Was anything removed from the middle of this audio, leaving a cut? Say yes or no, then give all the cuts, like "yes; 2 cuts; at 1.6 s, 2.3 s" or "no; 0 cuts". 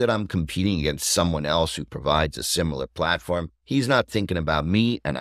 no; 0 cuts